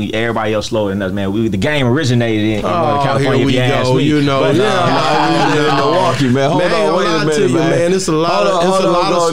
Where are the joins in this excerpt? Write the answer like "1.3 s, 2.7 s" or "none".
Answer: none

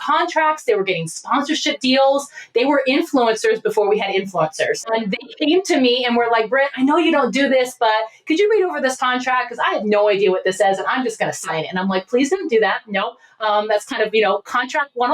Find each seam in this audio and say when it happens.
4.9 s

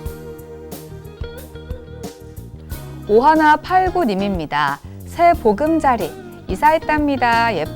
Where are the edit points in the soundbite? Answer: 1.4 s, 3.0 s

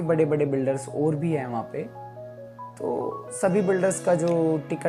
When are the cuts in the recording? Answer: none

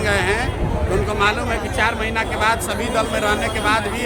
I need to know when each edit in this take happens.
none

